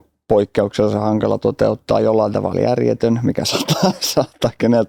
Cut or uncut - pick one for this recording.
uncut